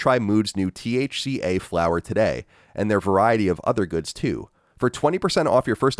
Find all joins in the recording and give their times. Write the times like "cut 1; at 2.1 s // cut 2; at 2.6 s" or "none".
none